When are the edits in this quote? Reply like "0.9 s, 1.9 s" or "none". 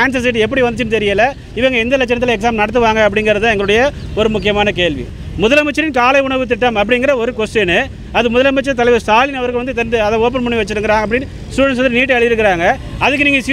5.1 s

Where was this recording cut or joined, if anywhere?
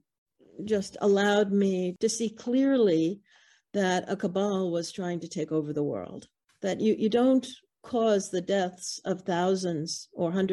1.9 s

